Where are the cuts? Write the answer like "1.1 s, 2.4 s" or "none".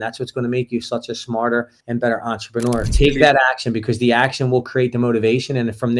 2.9 s